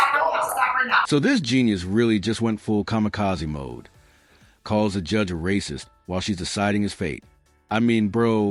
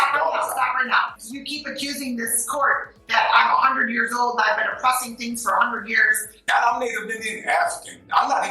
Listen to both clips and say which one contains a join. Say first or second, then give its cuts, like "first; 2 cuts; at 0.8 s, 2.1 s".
second; 2 cuts; at 1.1 s, 6.4 s